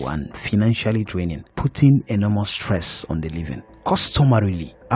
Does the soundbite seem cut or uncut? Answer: cut